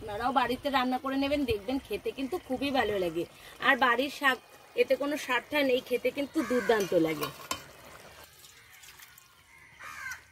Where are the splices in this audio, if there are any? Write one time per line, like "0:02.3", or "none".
0:08.2